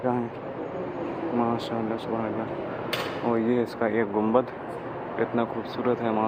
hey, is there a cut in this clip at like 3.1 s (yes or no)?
no